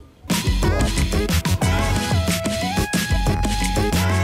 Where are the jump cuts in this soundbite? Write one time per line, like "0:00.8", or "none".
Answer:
none

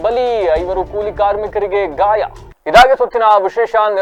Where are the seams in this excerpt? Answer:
none

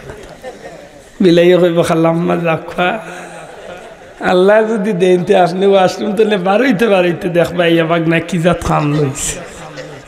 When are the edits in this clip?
none

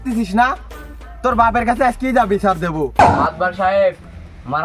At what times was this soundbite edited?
0:03.0

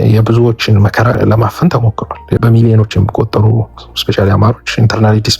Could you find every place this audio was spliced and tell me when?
0:01.2
0:02.4

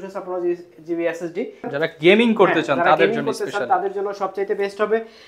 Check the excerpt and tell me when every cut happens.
0:01.7

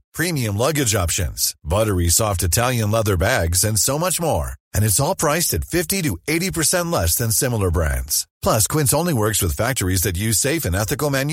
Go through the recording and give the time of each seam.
none

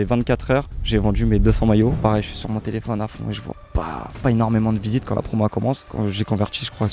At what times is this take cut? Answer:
0:02.0
0:05.9

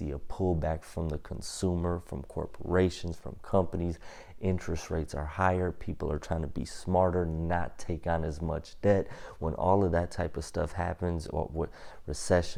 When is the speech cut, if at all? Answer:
none

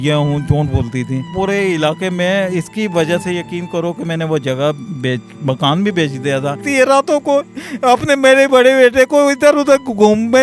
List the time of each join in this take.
0:01.3
0:06.7

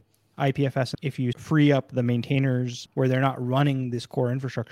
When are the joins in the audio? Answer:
0:01.2
0:02.8

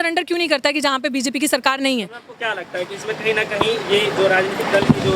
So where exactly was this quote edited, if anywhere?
none

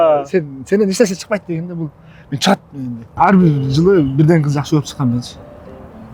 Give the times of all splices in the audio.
0:03.1

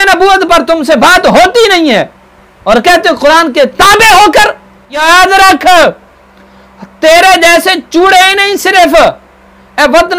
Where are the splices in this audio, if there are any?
0:05.0

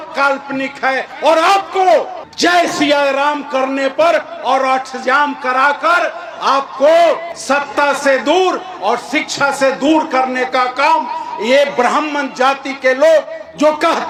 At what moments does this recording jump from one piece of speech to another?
none

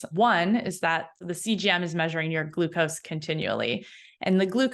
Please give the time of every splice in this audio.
0:01.2

